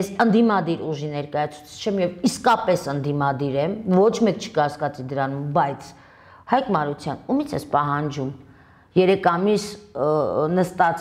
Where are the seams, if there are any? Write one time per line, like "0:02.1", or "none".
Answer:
none